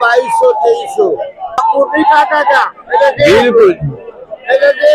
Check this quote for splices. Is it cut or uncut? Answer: cut